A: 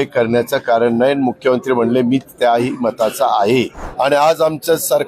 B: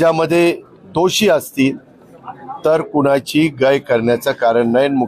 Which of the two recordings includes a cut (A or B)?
A